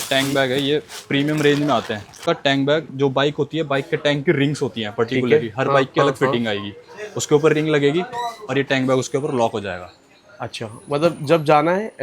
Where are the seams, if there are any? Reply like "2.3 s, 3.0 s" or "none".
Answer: 2.2 s

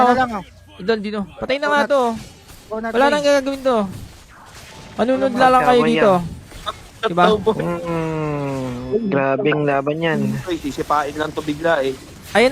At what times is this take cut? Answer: 10.4 s

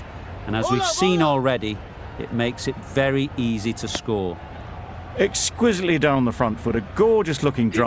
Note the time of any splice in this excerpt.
4.4 s

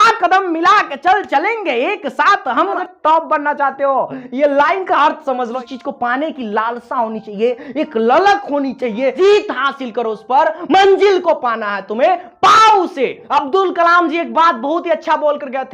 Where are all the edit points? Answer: 2.8 s, 5.6 s, 9.1 s, 13.2 s

